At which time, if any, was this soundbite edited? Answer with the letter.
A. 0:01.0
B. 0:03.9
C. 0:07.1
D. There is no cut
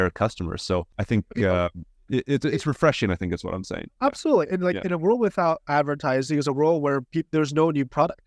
A